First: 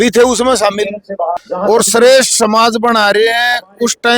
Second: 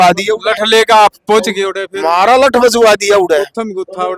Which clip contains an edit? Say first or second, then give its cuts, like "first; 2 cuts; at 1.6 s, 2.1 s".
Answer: first; 1 cut; at 1.4 s